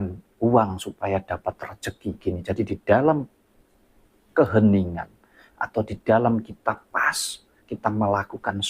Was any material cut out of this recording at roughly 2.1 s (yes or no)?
yes